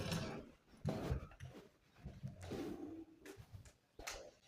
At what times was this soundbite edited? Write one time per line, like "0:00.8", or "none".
none